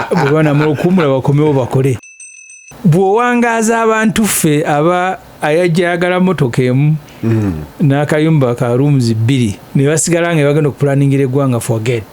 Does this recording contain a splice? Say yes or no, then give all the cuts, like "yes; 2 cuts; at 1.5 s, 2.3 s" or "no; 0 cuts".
yes; 2 cuts; at 2.1 s, 9.6 s